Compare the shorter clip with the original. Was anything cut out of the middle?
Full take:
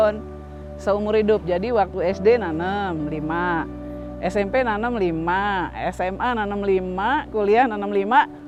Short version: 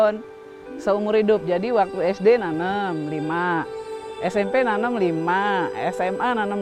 no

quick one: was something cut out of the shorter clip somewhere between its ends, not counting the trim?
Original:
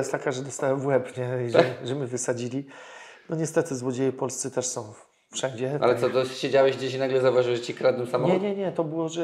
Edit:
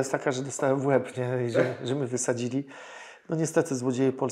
no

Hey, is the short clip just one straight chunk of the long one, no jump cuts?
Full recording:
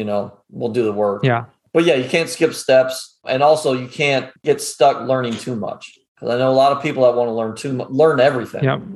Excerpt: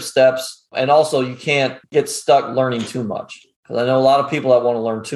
yes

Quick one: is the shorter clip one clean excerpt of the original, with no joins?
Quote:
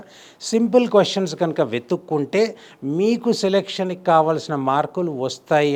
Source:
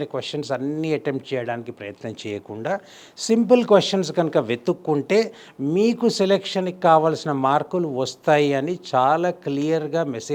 yes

